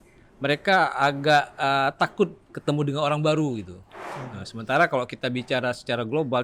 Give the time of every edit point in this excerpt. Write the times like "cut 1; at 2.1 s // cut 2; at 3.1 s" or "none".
none